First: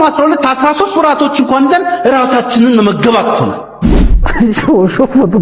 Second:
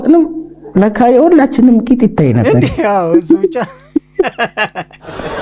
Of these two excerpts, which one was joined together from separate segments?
first; 1 cut; at 4.2 s

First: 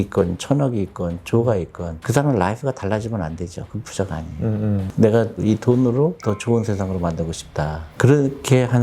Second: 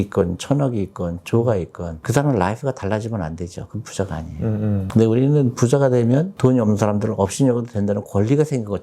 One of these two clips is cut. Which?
first; 1 cut; at 4.9 s

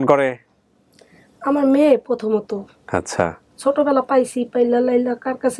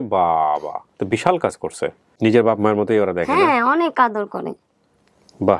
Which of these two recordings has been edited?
second; 1 cut; at 2.1 s

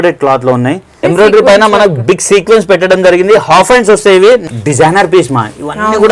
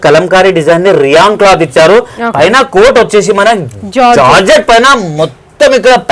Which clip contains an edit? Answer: first; 2 cuts; at 1.0 s, 4.4 s

